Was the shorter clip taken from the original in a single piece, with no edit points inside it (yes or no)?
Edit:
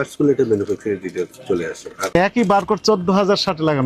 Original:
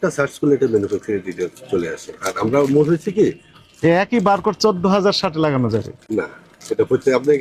no